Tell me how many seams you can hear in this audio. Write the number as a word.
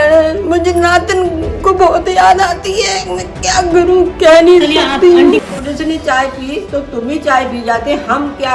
one